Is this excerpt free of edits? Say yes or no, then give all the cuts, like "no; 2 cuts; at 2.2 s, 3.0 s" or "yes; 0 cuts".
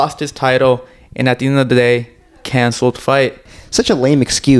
no; 1 cut; at 3.5 s